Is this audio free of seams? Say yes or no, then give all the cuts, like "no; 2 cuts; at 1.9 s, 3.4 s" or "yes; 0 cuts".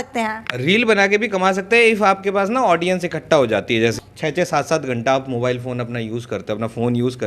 no; 1 cut; at 4.0 s